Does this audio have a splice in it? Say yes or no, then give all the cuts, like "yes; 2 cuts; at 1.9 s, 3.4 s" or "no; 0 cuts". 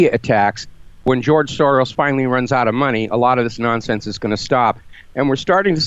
yes; 1 cut; at 1.0 s